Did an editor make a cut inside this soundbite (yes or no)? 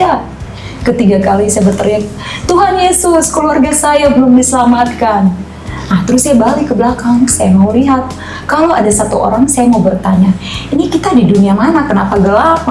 no